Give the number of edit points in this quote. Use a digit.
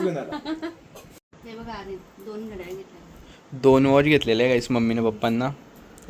1